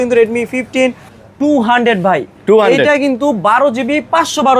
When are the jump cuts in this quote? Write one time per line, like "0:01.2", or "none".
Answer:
0:01.1